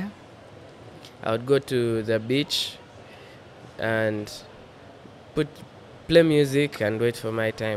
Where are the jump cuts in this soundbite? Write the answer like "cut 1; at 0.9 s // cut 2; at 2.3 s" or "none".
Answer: none